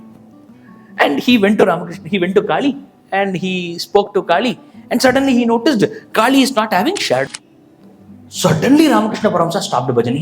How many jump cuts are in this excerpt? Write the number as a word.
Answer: one